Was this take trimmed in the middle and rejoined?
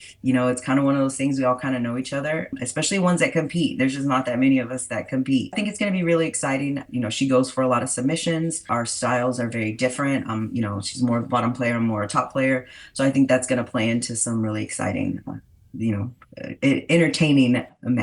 yes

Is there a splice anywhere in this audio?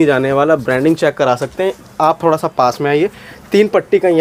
no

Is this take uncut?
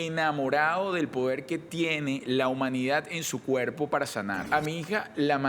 no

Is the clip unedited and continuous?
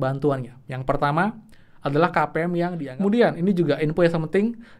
no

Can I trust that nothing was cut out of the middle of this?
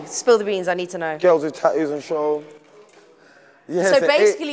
yes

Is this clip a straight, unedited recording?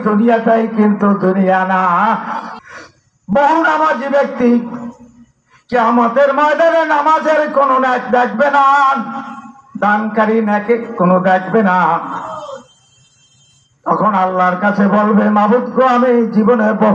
no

